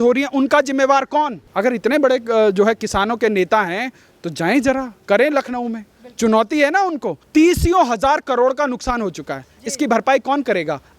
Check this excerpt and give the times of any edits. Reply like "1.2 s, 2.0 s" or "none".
1.4 s, 7.1 s